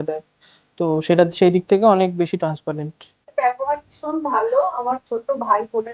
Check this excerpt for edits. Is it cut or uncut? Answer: cut